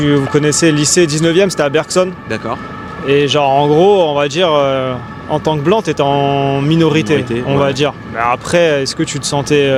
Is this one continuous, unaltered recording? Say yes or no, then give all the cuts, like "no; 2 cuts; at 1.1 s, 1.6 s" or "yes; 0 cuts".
yes; 0 cuts